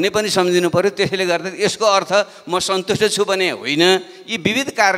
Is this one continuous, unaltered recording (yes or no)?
yes